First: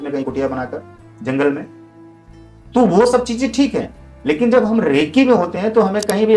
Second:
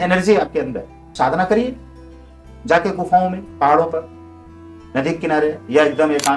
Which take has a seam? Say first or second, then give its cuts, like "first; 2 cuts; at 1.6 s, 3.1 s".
second; 1 cut; at 1.0 s